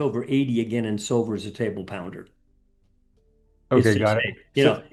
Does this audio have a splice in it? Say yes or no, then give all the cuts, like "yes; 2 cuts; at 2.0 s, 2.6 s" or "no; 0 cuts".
no; 0 cuts